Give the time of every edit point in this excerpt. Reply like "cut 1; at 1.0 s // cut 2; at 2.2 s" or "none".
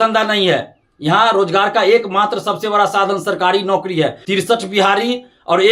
cut 1; at 4.2 s